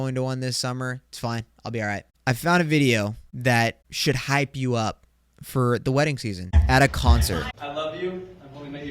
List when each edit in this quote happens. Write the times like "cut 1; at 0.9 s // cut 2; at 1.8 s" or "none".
cut 1; at 2.1 s // cut 2; at 3.3 s // cut 3; at 3.9 s // cut 4; at 6.6 s // cut 5; at 7.5 s